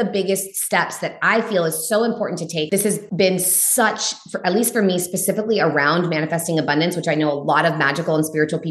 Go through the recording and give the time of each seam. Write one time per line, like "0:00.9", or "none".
0:03.0

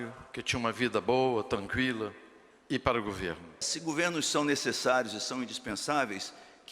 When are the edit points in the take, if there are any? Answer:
0:03.7

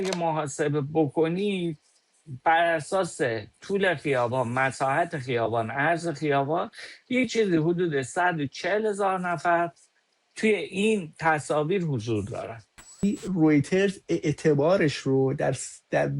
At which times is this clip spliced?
0:13.0

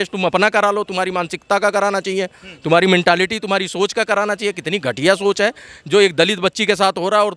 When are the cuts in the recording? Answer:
none

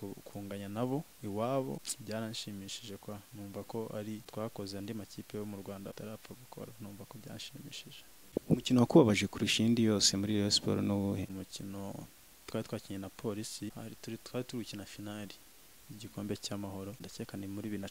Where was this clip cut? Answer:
0:01.9
0:04.3
0:05.9
0:08.3
0:11.4
0:13.7
0:17.1

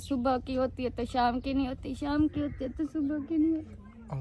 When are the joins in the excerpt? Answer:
none

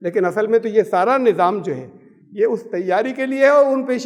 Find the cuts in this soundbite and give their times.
none

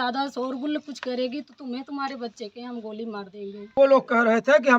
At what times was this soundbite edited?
0:03.6

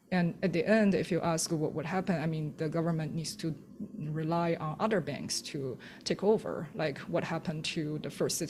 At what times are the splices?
none

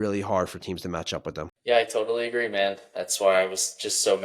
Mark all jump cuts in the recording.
0:01.5

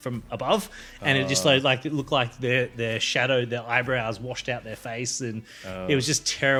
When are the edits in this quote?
none

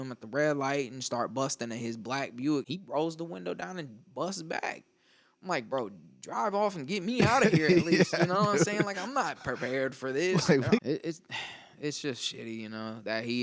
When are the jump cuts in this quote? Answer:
0:02.7
0:10.8

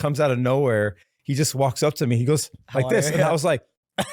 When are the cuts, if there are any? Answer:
none

